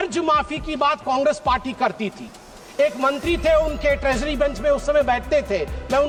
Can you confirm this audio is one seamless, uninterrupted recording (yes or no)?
yes